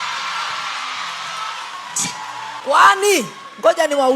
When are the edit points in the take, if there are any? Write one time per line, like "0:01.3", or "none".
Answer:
0:02.6